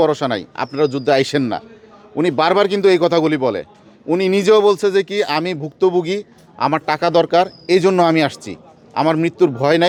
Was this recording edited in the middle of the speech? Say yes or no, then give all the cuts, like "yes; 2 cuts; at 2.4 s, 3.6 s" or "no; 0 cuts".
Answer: no; 0 cuts